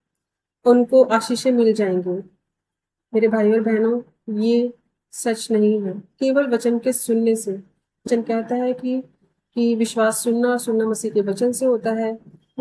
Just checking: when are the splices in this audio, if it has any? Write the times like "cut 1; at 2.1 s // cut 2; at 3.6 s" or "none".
cut 1; at 8.1 s